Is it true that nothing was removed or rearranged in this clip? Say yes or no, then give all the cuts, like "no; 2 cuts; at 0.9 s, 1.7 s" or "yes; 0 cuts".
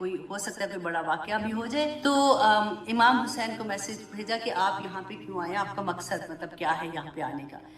no; 1 cut; at 2.0 s